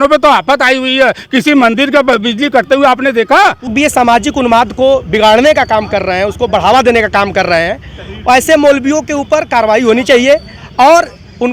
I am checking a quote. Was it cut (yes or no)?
yes